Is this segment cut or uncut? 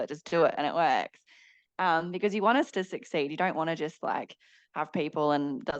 uncut